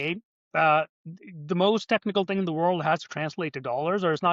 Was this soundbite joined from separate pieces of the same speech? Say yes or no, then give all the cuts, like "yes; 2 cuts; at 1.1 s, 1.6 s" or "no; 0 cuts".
no; 0 cuts